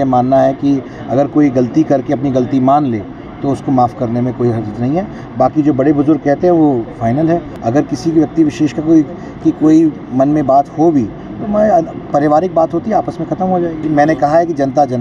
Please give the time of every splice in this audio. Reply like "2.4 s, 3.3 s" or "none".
7.5 s, 13.8 s